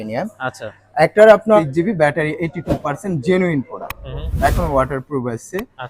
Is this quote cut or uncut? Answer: cut